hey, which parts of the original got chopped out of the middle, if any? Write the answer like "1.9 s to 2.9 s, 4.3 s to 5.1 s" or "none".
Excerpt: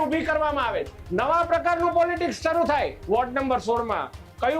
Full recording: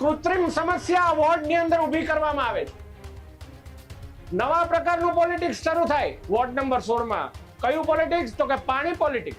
2.8 s to 4.2 s